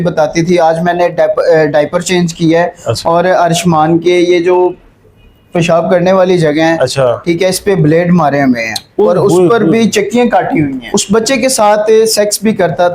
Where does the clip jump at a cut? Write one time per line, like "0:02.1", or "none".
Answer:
0:10.9